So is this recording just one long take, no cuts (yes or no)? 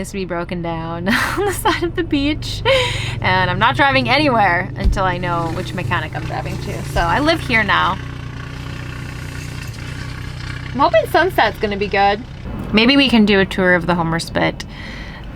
yes